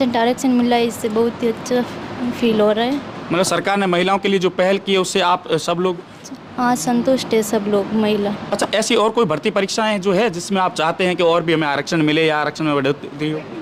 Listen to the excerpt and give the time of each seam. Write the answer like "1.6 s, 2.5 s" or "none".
none